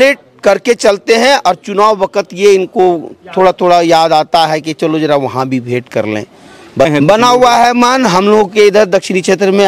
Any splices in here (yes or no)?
yes